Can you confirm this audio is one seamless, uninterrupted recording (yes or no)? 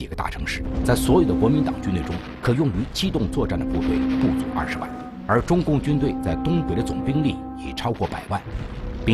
yes